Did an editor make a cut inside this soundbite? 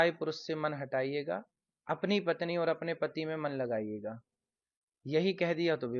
no; 0 cuts

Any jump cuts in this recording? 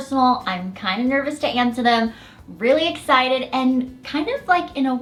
no; 0 cuts

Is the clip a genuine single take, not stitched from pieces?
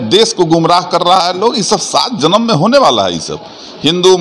yes; 0 cuts

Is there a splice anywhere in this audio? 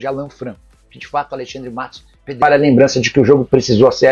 yes; 1 cut; at 2.4 s

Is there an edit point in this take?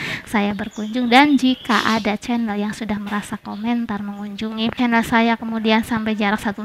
yes; 1 cut; at 4.8 s

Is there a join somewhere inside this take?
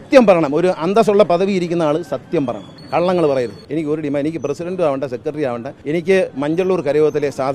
yes; 3 cuts; at 2.7 s, 3.6 s, 5.7 s

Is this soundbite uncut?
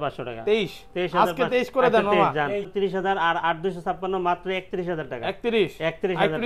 no; 1 cut; at 2.7 s

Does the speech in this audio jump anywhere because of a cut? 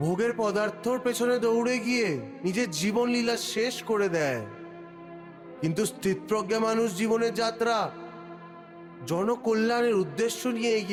no; 0 cuts

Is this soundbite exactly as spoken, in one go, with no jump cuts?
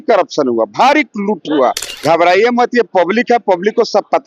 no; 1 cut; at 1.9 s

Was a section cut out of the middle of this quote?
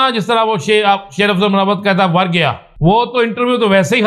yes; 1 cut; at 2.7 s

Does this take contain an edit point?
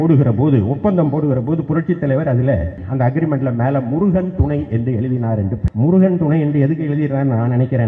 yes; 2 cuts; at 2.8 s, 5.6 s

